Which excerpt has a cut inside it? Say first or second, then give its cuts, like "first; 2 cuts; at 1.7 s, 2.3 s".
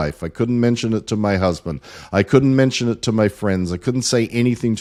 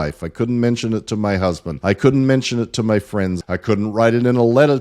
second; 2 cuts; at 1.7 s, 3.4 s